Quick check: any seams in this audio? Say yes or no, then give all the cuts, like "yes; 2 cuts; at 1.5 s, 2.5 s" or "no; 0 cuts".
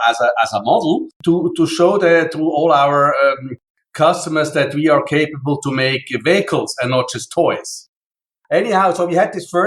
yes; 1 cut; at 7.8 s